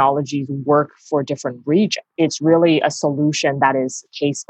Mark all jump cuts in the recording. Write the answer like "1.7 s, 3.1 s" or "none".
2.0 s